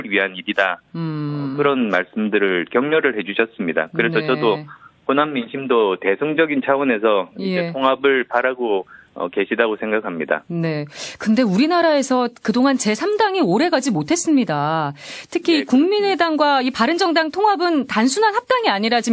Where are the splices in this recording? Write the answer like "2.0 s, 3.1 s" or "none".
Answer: none